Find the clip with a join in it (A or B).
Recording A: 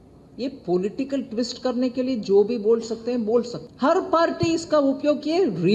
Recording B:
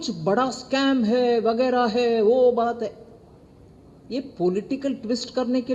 A